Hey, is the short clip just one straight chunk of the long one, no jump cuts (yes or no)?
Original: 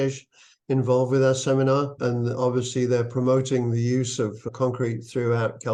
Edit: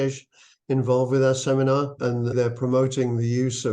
no